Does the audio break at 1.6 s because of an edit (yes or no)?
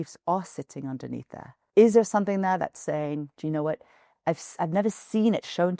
yes